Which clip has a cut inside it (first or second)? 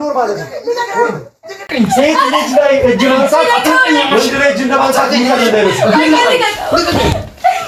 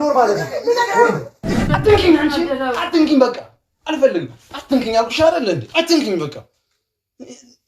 second